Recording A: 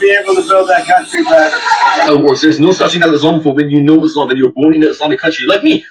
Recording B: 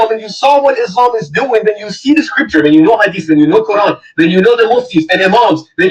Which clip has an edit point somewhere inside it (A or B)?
A